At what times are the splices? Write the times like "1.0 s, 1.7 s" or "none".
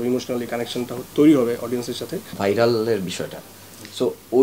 2.4 s

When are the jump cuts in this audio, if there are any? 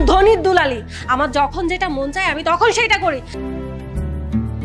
3.3 s

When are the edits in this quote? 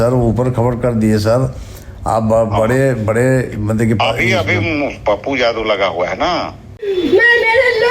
6.8 s

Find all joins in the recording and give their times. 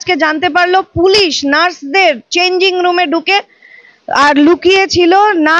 none

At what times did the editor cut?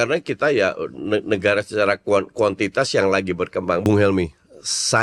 3.8 s

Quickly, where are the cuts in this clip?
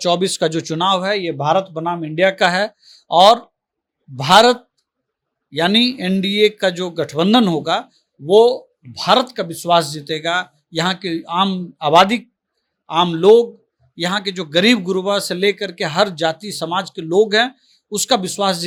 none

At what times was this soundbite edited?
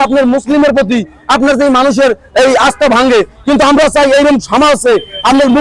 none

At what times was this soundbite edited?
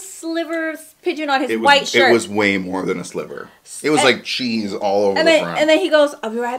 none

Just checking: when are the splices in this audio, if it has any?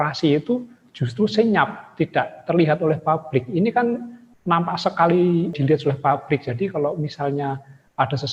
5.6 s

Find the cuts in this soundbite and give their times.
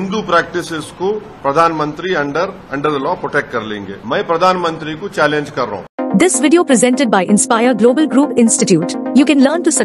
1.3 s, 2.6 s, 3.9 s, 5.9 s

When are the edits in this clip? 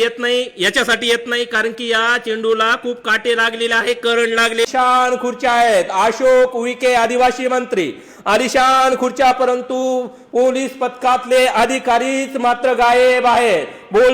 4.7 s

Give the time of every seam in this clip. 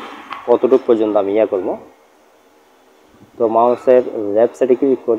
none

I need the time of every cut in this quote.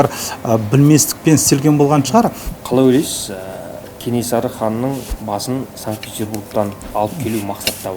2.4 s, 5.1 s, 6.8 s

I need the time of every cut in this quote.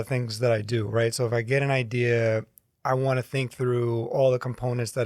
none

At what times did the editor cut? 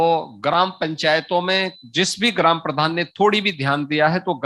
none

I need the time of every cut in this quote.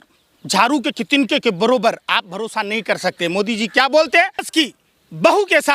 4.5 s

